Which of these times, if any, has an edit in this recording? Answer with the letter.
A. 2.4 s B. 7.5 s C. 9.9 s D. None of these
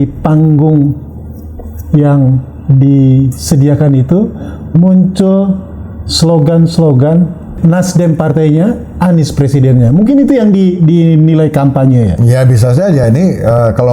B